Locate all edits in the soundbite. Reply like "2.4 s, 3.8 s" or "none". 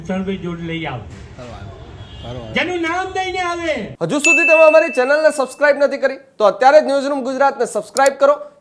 3.9 s